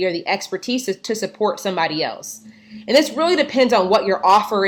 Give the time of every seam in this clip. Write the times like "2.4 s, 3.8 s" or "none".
none